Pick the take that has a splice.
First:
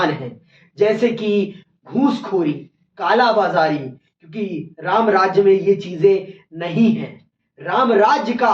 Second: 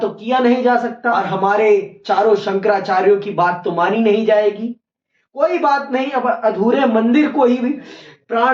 second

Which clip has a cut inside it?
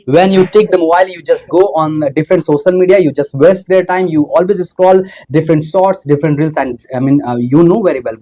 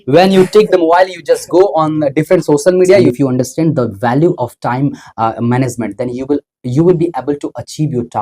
second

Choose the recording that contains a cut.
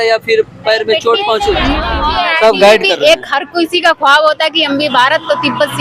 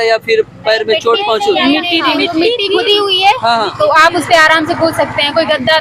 first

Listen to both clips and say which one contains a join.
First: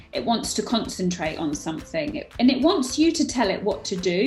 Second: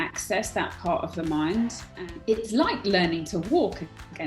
second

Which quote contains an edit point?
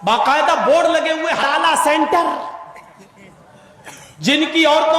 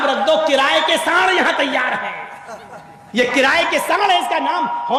first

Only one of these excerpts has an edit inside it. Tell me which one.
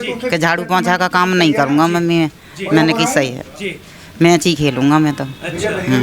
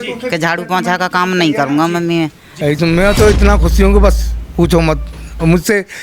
second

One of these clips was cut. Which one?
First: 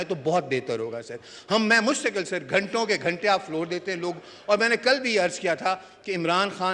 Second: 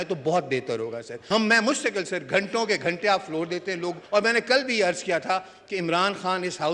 second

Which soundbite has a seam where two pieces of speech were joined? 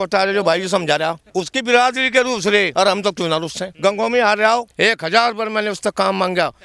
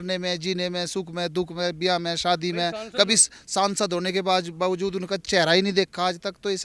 first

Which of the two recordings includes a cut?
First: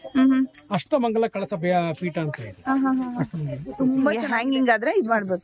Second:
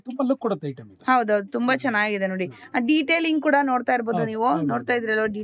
first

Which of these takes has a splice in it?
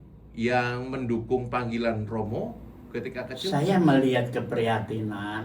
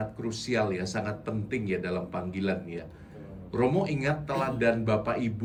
first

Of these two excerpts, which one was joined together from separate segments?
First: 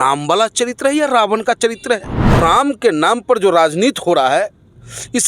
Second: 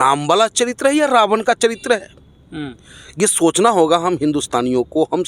first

